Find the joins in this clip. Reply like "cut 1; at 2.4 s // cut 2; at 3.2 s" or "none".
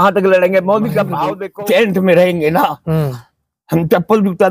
cut 1; at 1.4 s